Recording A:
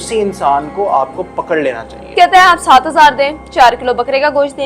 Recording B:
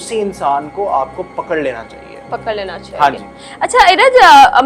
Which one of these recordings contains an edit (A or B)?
A